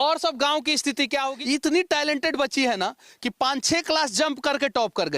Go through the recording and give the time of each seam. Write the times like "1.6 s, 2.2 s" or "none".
1.3 s